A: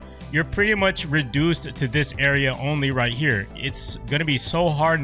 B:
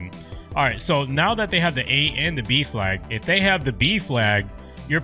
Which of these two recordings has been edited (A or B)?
B